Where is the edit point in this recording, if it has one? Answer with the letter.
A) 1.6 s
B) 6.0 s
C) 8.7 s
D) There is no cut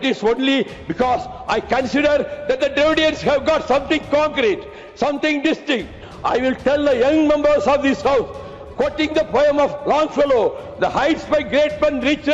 B